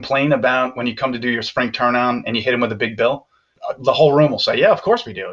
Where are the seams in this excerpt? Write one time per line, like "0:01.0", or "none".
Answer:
none